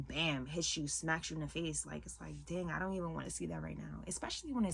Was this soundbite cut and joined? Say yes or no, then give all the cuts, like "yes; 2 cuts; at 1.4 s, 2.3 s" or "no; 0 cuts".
no; 0 cuts